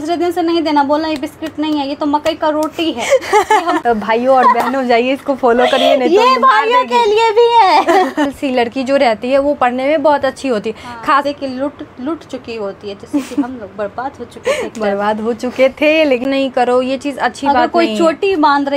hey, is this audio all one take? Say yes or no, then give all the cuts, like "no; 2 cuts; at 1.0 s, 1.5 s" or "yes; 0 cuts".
no; 4 cuts; at 3.8 s, 8.3 s, 11.2 s, 16.3 s